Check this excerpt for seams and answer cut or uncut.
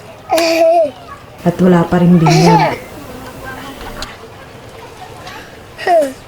uncut